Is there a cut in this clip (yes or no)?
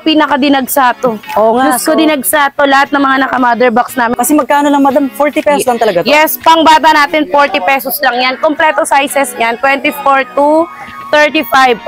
yes